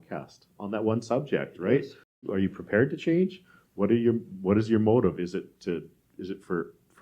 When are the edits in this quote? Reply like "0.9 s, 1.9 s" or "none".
2.2 s